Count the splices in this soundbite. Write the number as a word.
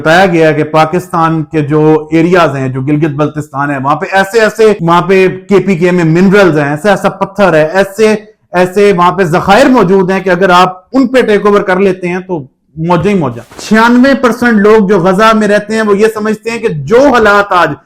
one